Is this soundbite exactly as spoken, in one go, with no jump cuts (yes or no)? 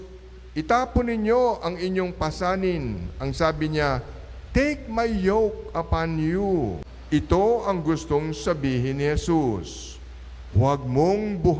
no